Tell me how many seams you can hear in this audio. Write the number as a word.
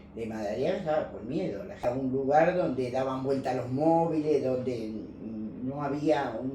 zero